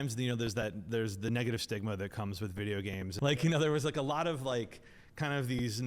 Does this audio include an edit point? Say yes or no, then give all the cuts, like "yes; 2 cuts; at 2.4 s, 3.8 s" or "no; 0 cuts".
yes; 1 cut; at 3.1 s